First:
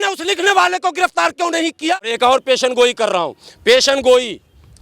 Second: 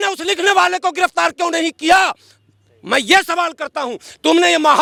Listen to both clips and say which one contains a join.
first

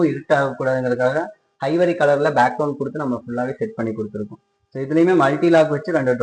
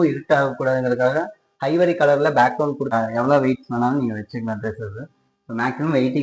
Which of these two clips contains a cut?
second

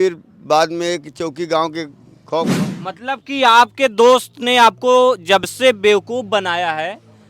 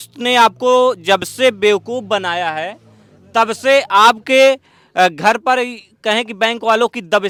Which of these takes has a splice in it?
first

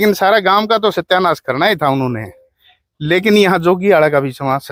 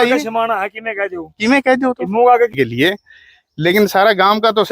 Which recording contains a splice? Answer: second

